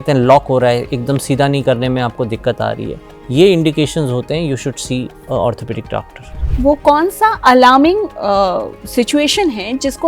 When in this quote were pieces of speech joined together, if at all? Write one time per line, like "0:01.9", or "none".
0:06.5